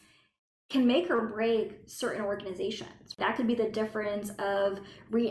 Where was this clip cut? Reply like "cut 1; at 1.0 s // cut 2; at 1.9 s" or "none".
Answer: cut 1; at 3.2 s